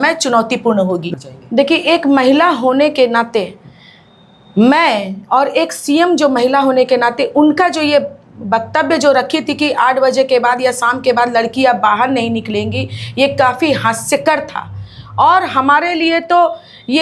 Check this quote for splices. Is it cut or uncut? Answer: cut